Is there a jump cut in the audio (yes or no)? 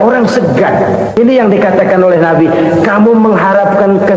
yes